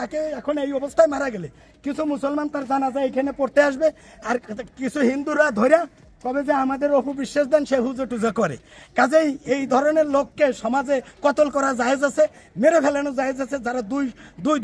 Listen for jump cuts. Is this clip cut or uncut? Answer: uncut